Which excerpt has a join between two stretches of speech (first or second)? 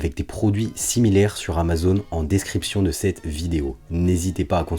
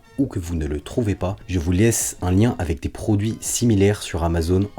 second